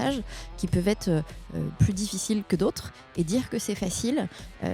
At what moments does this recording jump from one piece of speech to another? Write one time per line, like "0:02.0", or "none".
none